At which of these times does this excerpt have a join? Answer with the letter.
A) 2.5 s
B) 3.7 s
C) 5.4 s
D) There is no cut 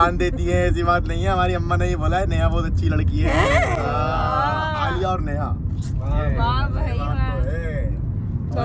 D